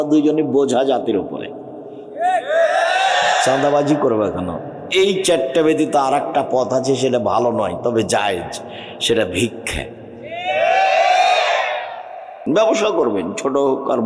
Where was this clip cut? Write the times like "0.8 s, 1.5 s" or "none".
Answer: 12.5 s